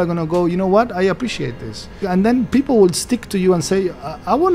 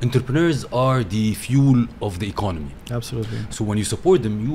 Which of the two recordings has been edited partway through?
first; 1 cut; at 2.1 s

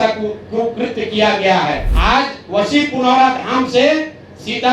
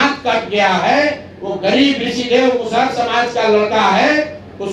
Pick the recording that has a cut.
first; 1 cut; at 1.9 s

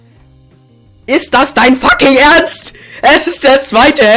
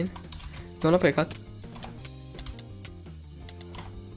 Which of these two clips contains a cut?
second; 1 cut; at 2.5 s

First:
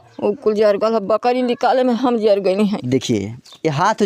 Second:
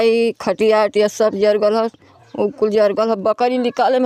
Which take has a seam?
first; 1 cut; at 2.8 s

